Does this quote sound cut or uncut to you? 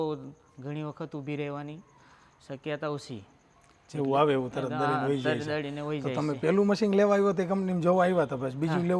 uncut